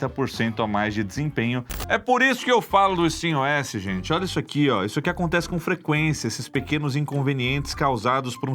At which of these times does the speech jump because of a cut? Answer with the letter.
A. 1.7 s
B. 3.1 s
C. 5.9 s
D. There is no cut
A